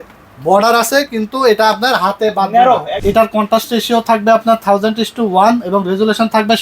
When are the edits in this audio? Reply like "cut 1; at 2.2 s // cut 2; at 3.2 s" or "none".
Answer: cut 1; at 3.0 s